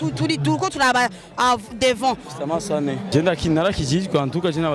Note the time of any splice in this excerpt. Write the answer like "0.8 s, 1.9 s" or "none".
3.0 s